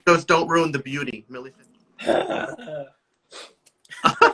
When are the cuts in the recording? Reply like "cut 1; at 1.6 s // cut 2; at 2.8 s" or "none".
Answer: cut 1; at 1.2 s